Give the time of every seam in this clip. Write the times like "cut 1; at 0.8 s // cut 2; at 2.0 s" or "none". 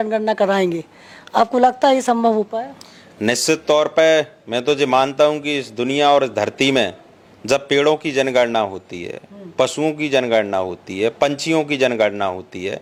none